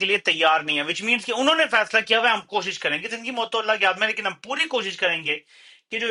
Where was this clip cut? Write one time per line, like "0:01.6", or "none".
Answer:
none